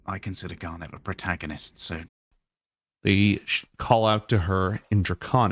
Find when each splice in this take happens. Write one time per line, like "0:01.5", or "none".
0:02.2